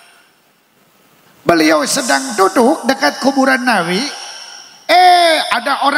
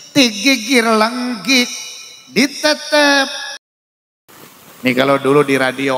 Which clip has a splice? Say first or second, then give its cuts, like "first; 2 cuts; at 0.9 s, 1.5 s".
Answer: second; 1 cut; at 3.8 s